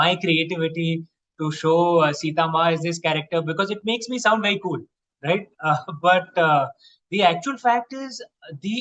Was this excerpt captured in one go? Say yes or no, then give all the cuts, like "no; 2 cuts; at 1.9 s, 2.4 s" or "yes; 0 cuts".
yes; 0 cuts